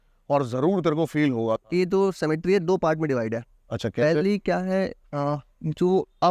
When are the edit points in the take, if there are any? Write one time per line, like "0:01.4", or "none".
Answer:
0:01.6